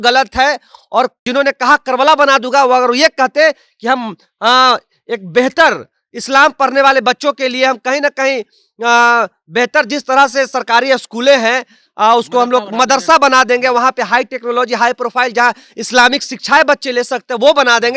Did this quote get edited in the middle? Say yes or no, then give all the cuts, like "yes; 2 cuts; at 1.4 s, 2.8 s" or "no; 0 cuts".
yes; 1 cut; at 1.3 s